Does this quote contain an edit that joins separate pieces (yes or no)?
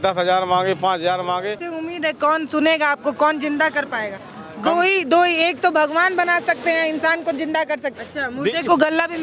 yes